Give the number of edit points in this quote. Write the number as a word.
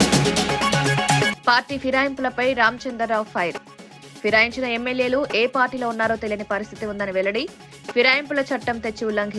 one